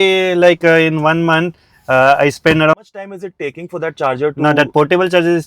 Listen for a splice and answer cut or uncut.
cut